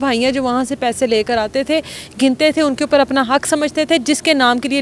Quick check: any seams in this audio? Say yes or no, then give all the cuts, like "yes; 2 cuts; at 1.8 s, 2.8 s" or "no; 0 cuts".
no; 0 cuts